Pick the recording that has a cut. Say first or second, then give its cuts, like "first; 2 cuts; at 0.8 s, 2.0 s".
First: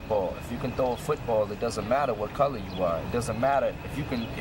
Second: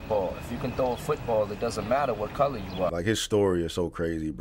second; 1 cut; at 2.9 s